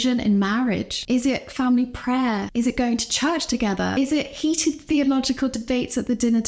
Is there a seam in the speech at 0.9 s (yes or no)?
yes